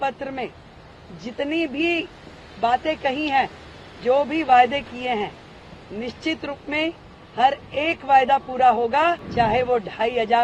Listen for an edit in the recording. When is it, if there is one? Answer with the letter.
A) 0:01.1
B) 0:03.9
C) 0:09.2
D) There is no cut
C